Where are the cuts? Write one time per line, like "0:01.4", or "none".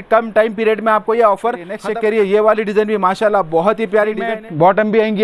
0:01.8
0:04.3